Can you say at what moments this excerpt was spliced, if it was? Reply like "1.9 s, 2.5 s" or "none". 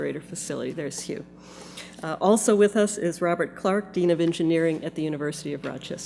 none